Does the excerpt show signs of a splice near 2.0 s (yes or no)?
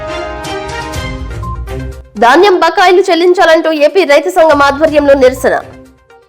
yes